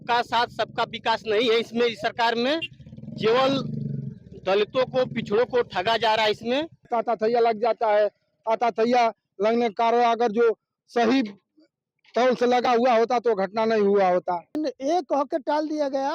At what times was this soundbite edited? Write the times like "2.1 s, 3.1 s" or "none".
6.9 s, 14.6 s